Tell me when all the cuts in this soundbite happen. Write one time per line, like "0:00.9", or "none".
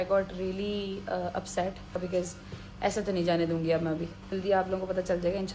0:02.0
0:04.3